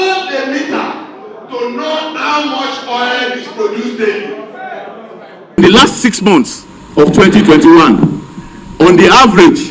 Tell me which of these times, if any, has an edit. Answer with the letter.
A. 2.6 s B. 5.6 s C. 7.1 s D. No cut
B